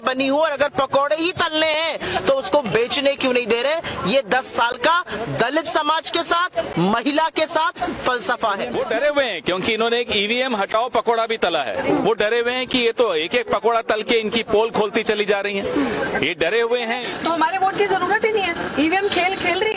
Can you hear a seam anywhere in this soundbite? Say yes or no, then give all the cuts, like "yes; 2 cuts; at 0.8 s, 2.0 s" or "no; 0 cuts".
yes; 2 cuts; at 8.8 s, 17.1 s